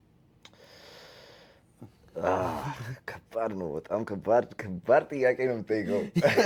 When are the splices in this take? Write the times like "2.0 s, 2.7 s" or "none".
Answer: none